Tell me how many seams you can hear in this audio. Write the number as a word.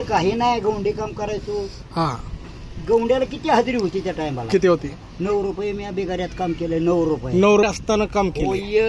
one